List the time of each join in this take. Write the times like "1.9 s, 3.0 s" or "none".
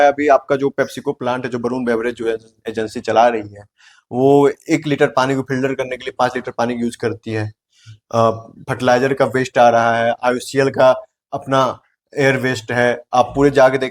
none